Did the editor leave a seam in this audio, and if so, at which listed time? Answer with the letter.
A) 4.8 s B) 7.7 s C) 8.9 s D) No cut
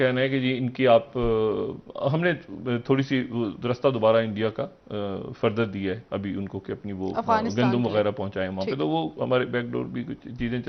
D